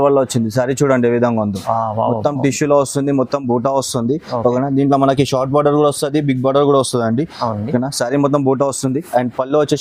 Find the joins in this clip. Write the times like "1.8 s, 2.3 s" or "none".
none